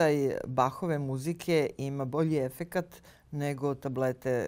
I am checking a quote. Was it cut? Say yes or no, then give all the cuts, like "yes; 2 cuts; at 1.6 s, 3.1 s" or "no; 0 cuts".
no; 0 cuts